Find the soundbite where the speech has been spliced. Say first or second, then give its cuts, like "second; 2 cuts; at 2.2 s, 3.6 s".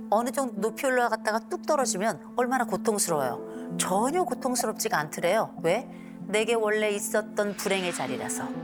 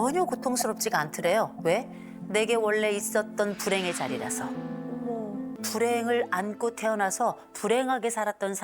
second; 1 cut; at 5.6 s